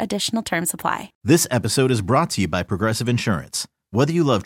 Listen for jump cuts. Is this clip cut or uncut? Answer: cut